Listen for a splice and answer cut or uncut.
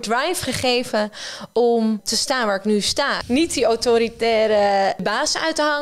cut